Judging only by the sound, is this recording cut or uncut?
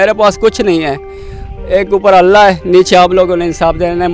uncut